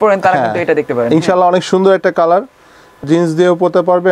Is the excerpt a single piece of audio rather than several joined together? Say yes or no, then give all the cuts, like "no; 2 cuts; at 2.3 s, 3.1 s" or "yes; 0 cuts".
no; 1 cut; at 3.0 s